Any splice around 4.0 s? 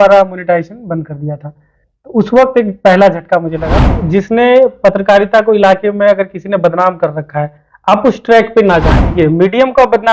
yes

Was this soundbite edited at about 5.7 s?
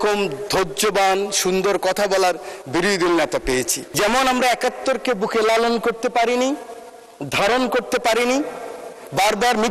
no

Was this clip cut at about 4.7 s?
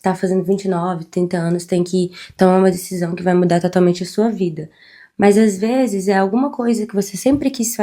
no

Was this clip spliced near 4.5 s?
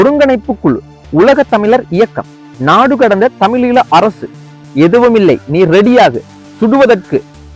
yes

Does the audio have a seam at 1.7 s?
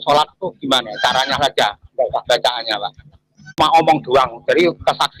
no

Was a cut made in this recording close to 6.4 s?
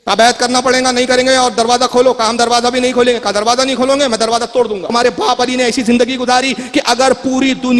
no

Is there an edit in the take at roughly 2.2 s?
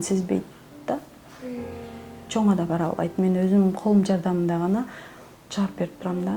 no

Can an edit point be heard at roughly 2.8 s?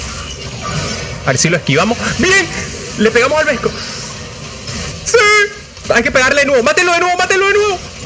no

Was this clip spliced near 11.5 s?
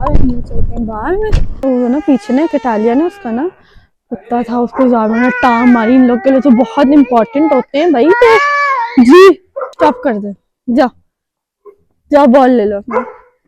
no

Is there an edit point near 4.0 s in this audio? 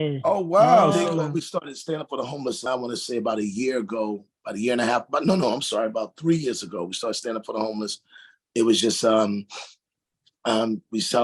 no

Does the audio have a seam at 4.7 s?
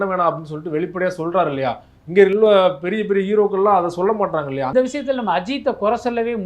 yes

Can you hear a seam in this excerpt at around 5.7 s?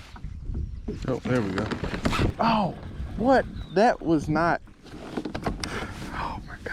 no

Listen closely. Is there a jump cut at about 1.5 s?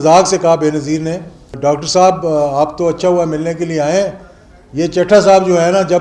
yes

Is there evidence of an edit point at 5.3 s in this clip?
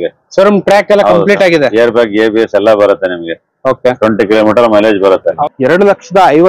yes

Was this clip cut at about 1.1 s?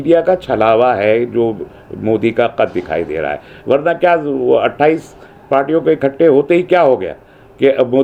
no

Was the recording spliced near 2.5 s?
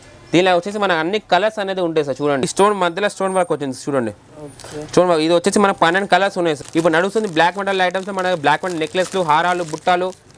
yes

